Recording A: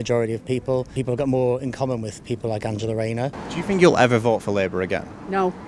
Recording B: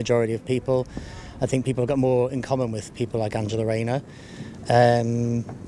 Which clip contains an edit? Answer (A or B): A